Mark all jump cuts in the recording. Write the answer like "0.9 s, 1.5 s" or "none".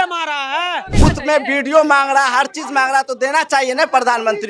1.0 s